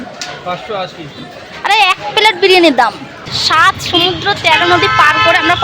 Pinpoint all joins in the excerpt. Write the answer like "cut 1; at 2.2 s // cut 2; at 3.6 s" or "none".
cut 1; at 3.3 s